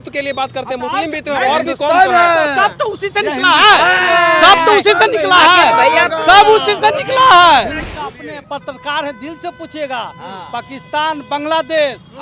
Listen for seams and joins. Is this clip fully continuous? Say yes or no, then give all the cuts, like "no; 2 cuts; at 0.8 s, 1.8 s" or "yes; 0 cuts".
no; 1 cut; at 7.8 s